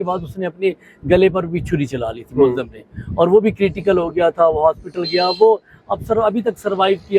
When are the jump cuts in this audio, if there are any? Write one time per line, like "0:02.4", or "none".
none